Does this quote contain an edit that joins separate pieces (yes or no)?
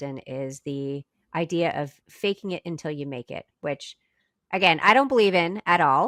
no